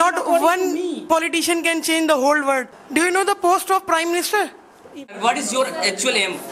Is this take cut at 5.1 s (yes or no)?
yes